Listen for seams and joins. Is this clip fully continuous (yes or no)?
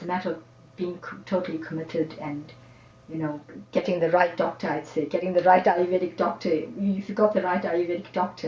yes